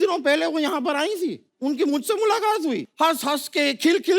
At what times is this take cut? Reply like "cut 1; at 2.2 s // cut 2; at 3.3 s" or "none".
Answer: cut 1; at 1.5 s // cut 2; at 2.9 s

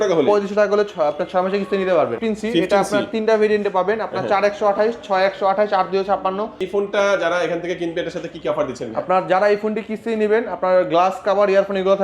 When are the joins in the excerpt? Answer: cut 1; at 2.2 s // cut 2; at 6.6 s

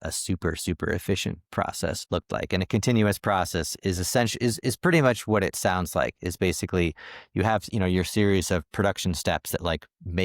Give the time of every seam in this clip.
cut 1; at 2.0 s

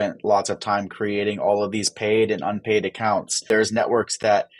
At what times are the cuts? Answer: cut 1; at 3.4 s

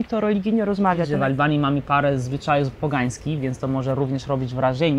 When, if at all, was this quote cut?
cut 1; at 1.1 s

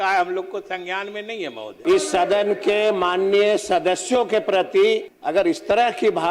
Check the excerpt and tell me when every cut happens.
cut 1; at 1.8 s // cut 2; at 5.1 s

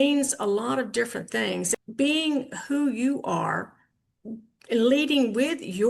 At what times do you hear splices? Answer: cut 1; at 1.7 s

